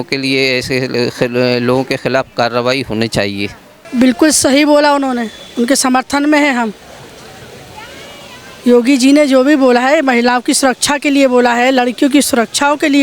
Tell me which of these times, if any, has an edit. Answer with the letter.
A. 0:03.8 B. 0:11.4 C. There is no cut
A